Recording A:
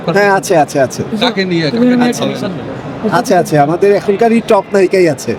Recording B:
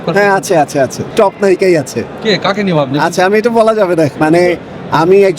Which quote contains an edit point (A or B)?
B